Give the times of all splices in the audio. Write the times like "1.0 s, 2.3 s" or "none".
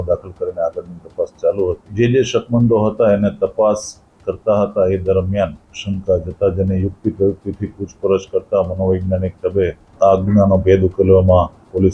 1.9 s, 5.7 s, 9.8 s